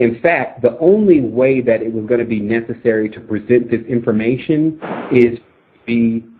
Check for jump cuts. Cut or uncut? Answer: cut